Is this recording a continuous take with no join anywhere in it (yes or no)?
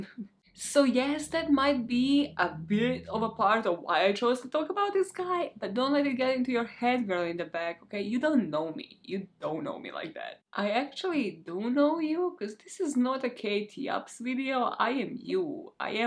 yes